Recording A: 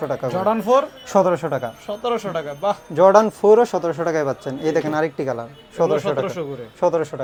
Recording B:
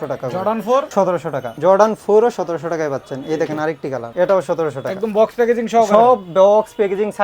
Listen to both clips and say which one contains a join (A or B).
B